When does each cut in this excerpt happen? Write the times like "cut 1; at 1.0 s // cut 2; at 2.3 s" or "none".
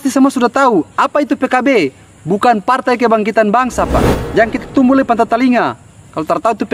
cut 1; at 4.2 s